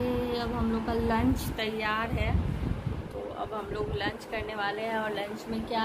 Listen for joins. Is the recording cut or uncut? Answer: uncut